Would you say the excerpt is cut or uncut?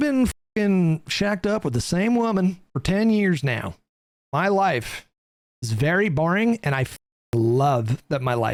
uncut